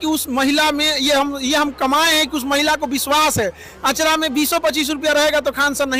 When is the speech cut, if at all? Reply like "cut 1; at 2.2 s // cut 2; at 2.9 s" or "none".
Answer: none